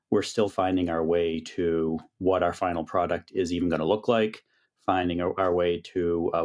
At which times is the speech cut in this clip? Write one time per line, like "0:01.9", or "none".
none